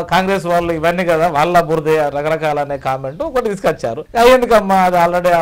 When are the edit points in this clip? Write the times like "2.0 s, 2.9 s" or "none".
none